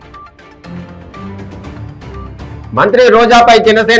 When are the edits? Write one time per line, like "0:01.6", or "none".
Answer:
none